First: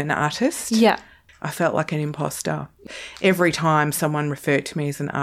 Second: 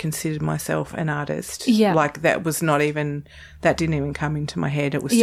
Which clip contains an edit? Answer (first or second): first